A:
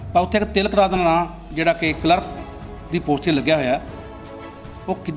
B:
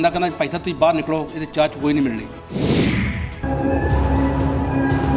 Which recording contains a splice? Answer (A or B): B